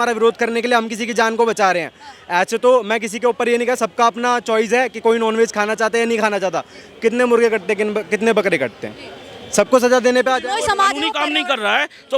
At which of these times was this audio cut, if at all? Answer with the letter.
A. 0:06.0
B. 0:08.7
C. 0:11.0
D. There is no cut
C